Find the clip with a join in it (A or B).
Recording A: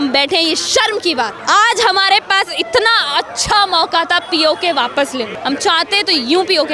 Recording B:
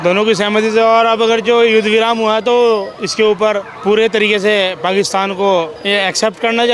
A